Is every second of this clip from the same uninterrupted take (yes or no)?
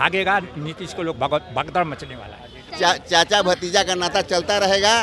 no